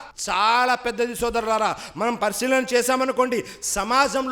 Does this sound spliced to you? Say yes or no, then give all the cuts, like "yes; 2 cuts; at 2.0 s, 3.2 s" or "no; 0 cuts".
no; 0 cuts